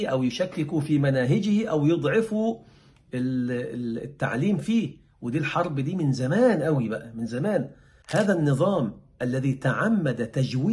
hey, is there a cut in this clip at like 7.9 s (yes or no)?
yes